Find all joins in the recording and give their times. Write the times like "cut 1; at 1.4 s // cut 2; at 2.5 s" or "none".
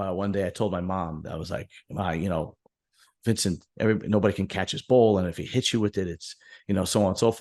none